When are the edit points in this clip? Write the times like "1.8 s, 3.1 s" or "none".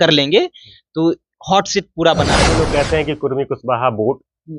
2.4 s